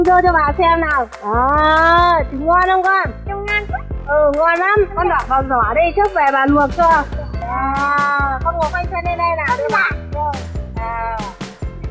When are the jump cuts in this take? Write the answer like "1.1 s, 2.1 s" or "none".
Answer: 7.4 s